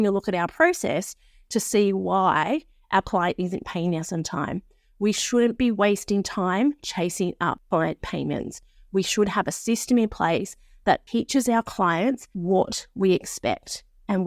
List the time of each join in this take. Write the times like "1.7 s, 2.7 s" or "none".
7.6 s, 12.3 s